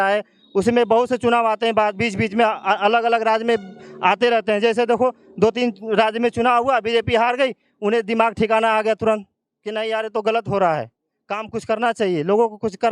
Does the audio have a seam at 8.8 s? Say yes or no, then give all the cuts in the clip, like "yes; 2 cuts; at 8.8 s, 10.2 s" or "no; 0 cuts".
no; 0 cuts